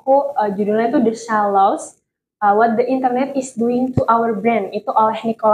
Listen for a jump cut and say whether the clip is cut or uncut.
uncut